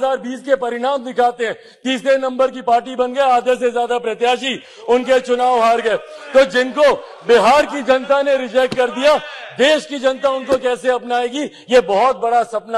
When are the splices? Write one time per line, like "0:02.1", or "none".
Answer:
none

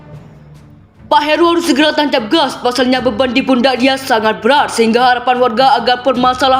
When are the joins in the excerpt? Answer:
0:01.0

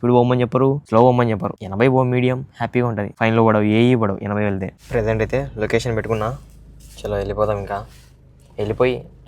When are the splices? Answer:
0:00.8
0:01.6
0:03.1
0:04.8

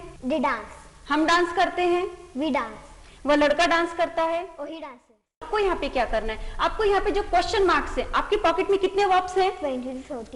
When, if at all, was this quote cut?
0:05.4

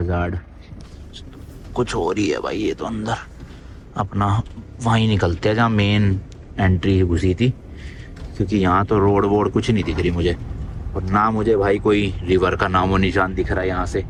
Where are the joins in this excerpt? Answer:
none

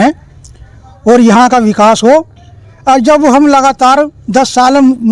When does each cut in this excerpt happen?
none

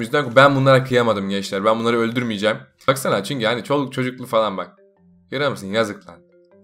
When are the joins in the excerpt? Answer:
0:02.9

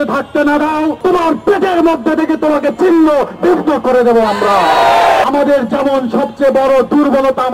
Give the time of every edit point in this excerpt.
0:01.0
0:05.2

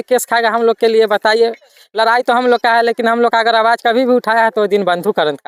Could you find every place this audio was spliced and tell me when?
none

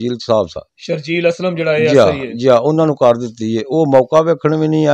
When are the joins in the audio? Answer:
none

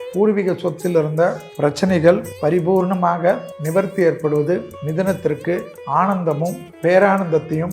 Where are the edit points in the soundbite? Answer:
0:01.5
0:02.3
0:03.5
0:04.8
0:05.7
0:06.7

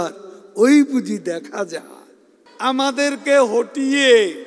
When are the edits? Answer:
0:02.4

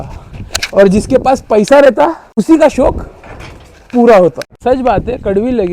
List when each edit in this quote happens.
0:04.5

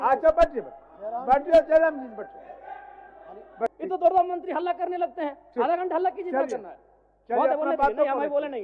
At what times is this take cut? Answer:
0:03.8

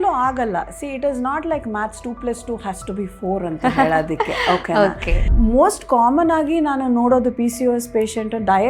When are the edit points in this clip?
0:05.3

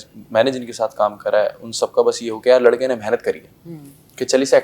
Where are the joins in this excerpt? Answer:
none

